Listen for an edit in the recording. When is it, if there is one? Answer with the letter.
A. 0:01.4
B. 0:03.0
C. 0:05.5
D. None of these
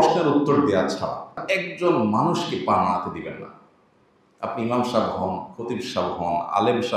A